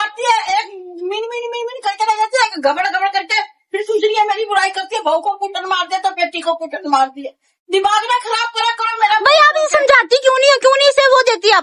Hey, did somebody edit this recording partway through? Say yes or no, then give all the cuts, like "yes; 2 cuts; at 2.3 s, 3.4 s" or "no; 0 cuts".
no; 0 cuts